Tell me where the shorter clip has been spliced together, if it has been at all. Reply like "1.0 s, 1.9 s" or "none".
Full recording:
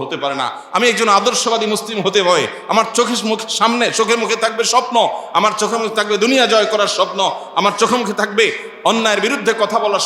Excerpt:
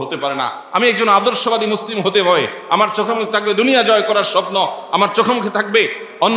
2.6 s